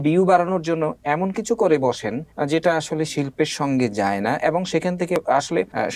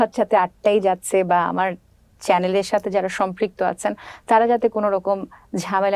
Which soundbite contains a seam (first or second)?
first